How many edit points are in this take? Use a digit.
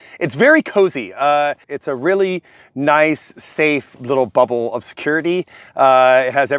1